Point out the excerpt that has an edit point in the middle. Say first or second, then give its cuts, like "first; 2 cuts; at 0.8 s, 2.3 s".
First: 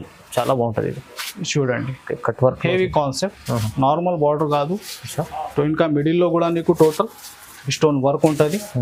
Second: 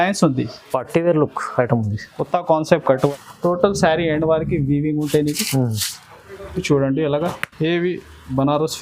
second; 1 cut; at 3.1 s